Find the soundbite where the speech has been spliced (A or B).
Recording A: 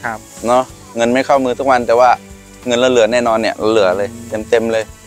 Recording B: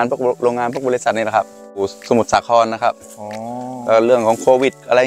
B